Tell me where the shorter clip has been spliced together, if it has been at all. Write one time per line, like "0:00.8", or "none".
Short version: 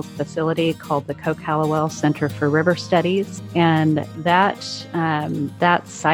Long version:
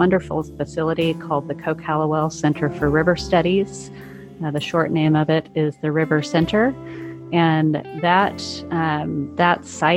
0:03.4